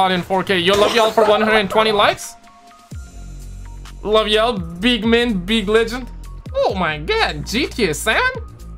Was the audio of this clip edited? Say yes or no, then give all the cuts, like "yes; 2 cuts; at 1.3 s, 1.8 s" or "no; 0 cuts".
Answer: no; 0 cuts